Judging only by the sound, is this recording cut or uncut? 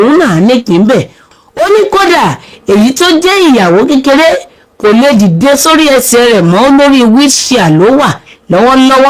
cut